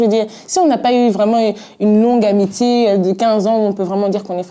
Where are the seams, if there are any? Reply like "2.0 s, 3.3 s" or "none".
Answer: 2.8 s